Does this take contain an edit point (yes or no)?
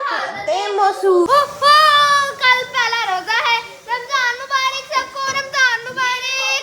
yes